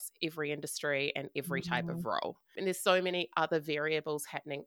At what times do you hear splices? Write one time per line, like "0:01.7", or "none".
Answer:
0:02.4